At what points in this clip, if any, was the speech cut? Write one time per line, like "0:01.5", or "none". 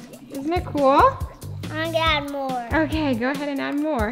none